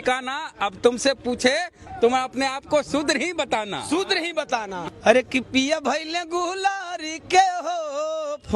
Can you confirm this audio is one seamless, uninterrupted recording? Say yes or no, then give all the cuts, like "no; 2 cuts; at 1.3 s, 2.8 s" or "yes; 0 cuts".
no; 1 cut; at 4.9 s